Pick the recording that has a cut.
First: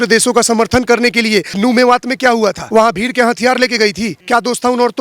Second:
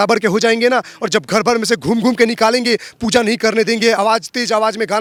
first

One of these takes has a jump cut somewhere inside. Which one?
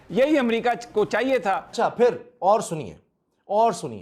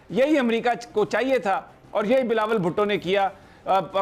first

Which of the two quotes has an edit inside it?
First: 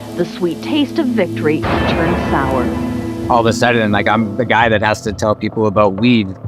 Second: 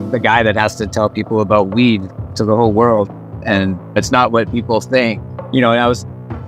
first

